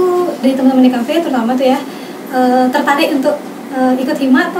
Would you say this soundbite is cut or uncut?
uncut